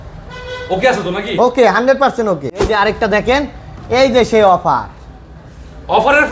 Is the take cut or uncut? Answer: cut